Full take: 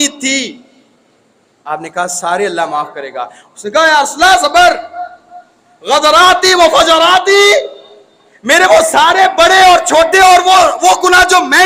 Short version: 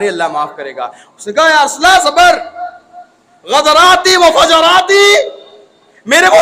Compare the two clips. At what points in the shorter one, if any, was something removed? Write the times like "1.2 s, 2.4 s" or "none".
none